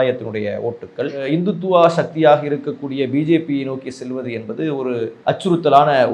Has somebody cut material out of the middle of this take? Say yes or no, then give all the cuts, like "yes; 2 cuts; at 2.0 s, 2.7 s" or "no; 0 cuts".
no; 0 cuts